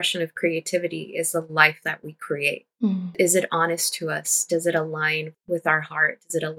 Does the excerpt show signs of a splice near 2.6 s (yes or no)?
no